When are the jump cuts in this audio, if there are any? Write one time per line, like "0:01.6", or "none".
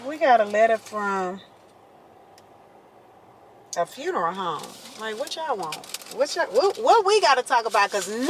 none